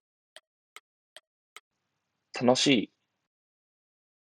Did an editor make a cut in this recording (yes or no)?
yes